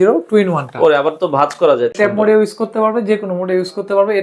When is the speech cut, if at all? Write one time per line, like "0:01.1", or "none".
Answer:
0:01.9

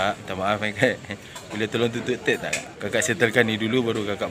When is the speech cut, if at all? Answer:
0:02.7

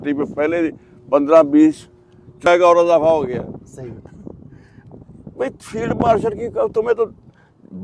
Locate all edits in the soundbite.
0:02.5

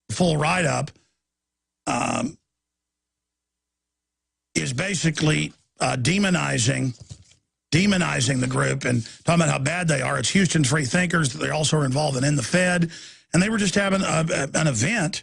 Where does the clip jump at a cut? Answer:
0:11.7

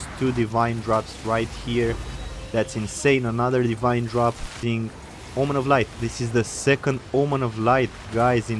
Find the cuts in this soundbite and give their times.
0:04.6

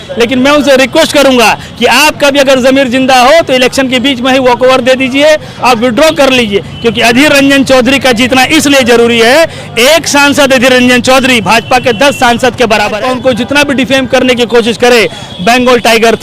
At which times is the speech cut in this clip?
0:13.0

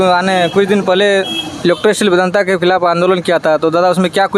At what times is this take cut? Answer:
none

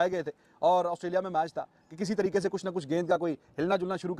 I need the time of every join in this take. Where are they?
none

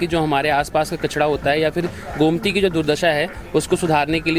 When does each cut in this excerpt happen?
none

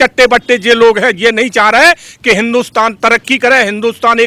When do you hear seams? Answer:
none

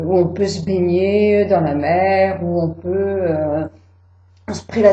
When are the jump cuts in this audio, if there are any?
0:01.7

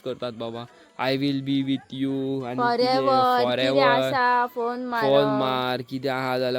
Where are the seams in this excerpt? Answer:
none

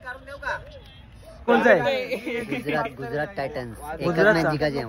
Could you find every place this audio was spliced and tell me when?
0:01.5

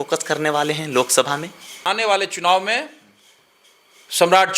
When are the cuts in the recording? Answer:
0:01.8

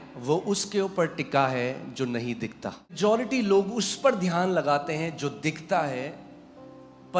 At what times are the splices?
0:03.0

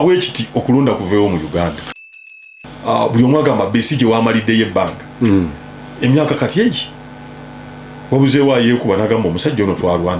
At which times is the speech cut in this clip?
0:02.3

